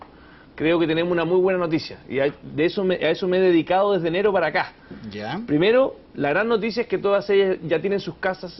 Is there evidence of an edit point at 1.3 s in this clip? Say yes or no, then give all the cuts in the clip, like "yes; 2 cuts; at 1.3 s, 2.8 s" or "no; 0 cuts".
no; 0 cuts